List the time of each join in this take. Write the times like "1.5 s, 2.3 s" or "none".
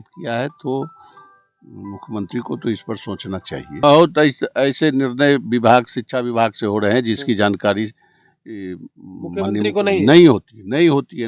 3.8 s